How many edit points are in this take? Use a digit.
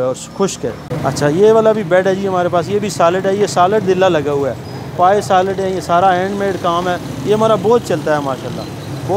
1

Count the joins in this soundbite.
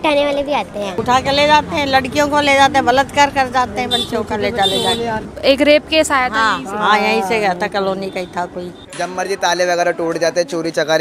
2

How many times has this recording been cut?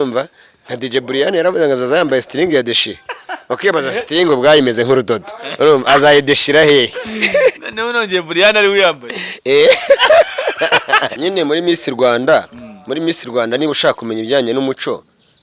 1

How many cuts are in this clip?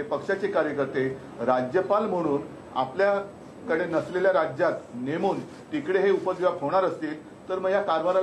0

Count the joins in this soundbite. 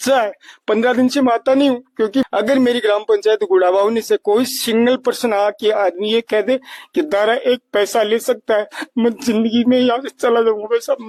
0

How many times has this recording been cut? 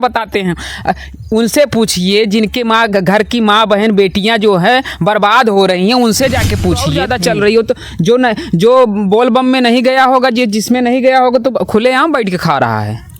1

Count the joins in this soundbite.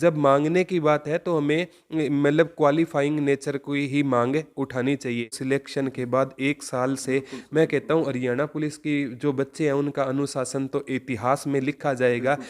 1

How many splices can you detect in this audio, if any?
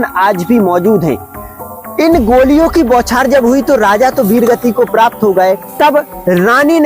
1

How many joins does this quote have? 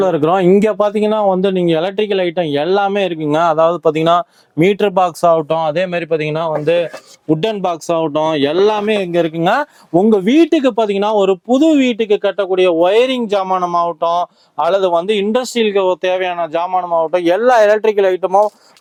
0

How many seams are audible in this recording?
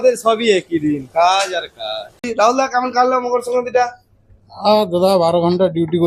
1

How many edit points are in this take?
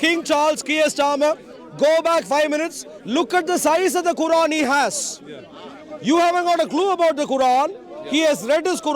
0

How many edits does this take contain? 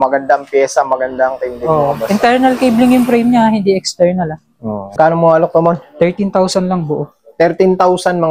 1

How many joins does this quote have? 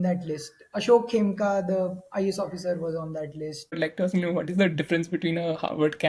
1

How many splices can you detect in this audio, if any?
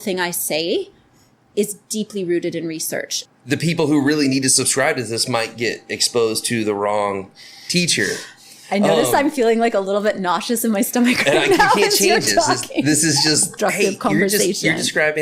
2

